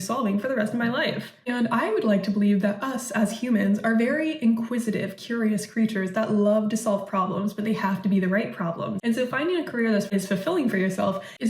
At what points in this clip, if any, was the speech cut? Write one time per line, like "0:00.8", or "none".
0:09.0
0:10.1